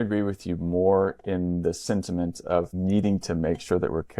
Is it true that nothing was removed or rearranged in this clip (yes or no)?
no